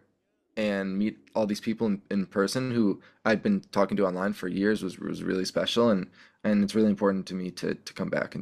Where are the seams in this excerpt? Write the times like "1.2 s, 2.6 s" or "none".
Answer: none